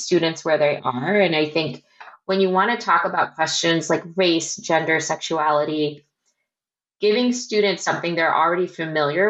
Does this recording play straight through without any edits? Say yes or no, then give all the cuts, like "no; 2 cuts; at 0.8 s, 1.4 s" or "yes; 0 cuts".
yes; 0 cuts